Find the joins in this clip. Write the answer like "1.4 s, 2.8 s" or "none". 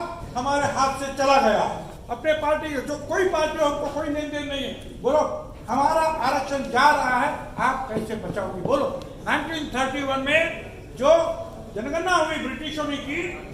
1.9 s, 9.1 s